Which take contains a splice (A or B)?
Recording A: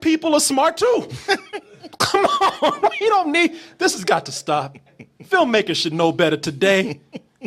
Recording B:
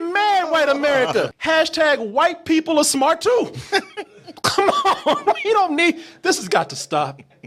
B